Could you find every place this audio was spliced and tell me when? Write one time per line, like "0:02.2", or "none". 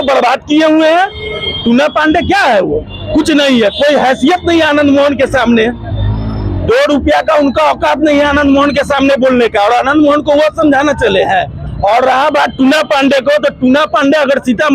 0:11.6